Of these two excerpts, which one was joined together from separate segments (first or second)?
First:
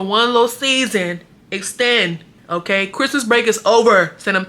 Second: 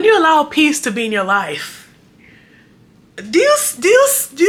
first